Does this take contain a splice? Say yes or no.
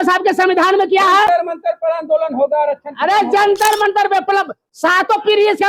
no